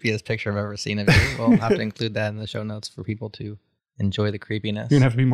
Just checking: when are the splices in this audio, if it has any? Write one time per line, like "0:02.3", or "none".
none